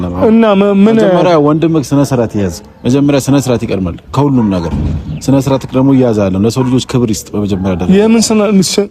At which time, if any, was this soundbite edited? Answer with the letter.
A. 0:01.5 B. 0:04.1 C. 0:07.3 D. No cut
D